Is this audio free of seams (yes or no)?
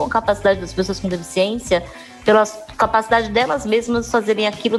yes